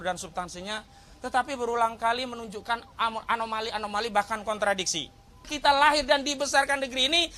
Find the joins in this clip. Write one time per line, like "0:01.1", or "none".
0:05.5